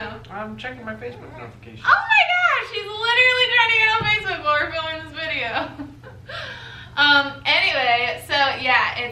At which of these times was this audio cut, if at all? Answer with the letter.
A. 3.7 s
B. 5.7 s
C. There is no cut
C